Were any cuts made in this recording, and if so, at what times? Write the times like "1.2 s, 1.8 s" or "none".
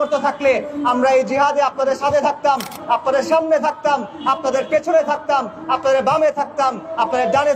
none